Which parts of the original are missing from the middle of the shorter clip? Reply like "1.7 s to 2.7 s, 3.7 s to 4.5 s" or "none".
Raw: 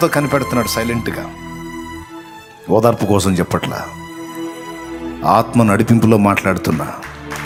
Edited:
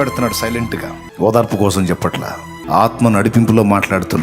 1.3 s to 2.5 s, 4.0 s to 5.0 s